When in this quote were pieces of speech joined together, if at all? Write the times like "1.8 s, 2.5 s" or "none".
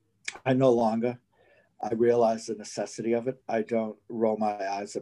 3.4 s